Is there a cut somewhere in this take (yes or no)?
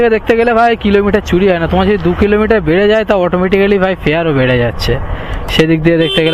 no